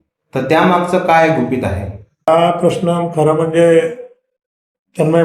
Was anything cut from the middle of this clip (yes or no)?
yes